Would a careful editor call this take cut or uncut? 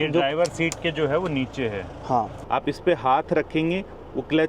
cut